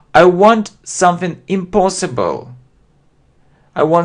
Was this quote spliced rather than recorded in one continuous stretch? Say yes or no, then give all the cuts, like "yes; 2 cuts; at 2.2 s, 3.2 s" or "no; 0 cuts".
yes; 1 cut; at 1.3 s